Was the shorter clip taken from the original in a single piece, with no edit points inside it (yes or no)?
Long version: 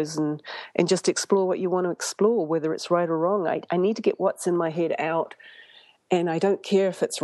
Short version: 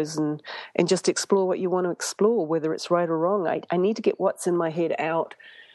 yes